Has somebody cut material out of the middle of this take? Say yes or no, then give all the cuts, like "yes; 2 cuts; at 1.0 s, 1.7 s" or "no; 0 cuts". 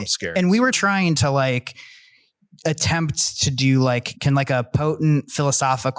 yes; 2 cuts; at 1.1 s, 4.1 s